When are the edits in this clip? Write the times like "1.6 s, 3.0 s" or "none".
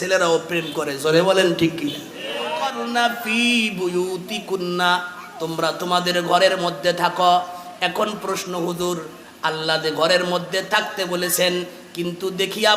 2.8 s